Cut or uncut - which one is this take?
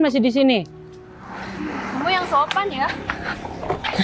uncut